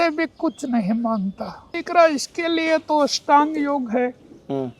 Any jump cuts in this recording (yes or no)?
yes